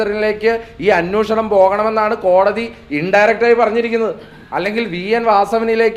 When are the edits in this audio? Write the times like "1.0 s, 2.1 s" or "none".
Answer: none